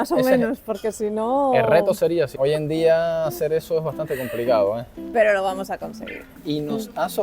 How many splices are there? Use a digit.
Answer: 2